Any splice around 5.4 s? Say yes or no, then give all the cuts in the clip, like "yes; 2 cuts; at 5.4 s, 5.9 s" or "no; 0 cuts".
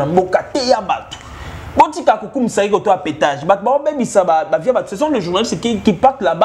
no; 0 cuts